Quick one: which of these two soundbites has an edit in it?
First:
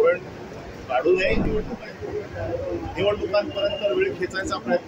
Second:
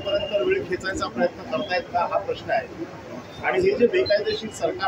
first; 1 cut; at 1.4 s

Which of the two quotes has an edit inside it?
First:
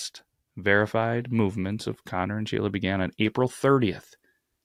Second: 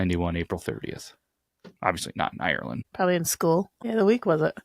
second; 2 cuts; at 2.9 s, 3.8 s

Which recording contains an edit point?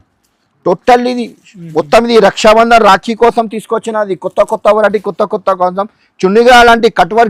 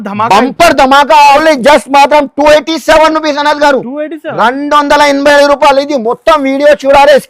second; 1 cut; at 1.4 s

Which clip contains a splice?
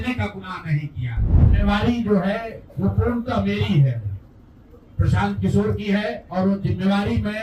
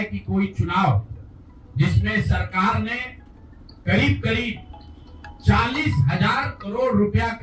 first; 1 cut; at 1.5 s

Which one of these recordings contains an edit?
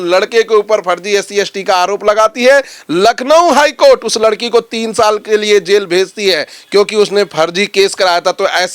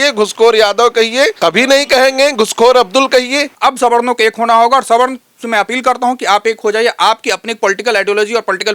second; 2 cuts; at 1.3 s, 3.5 s

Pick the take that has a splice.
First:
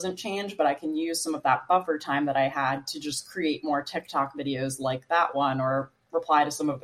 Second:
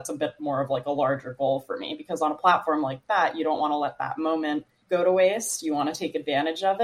second; 1 cut; at 4.7 s

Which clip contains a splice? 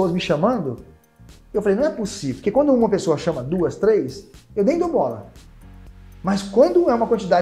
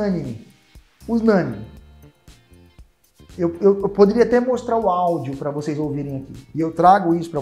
second; 1 cut; at 6.4 s

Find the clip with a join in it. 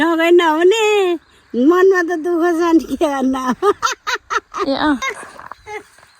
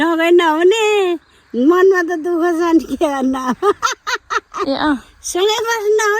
first; 1 cut; at 5.2 s

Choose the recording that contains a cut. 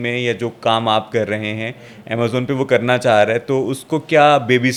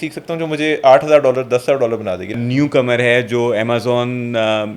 second; 1 cut; at 2.3 s

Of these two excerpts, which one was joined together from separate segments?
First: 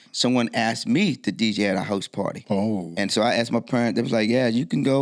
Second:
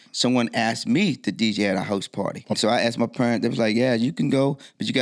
second; 1 cut; at 2.5 s

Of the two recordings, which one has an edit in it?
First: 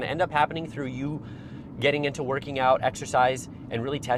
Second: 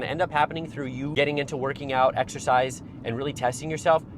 second; 1 cut; at 1.1 s

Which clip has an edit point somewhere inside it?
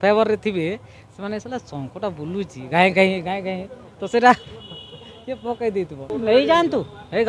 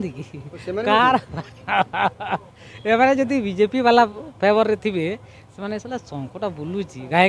first; 1 cut; at 6.0 s

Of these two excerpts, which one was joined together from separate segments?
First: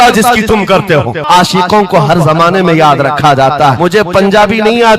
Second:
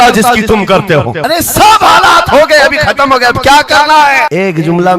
first; 2 cuts; at 1.2 s, 3.8 s

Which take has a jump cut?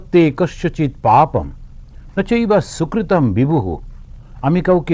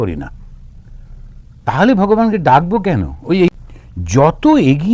second; 1 cut; at 3.6 s

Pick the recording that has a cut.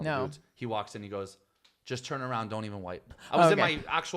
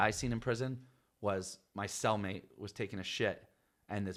first; 1 cut; at 3.2 s

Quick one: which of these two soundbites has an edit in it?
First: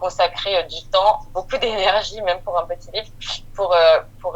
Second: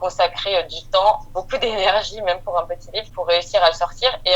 second; 1 cut; at 3.1 s

